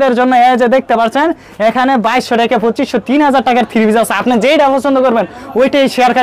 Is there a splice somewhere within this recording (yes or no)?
no